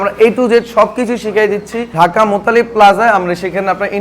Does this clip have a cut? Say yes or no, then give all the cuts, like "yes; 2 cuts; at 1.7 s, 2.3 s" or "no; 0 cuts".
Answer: yes; 1 cut; at 1.8 s